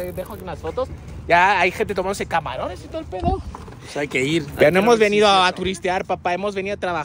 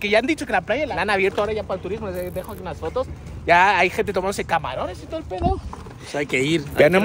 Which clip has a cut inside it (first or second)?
second